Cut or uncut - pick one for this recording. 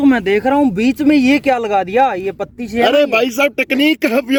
uncut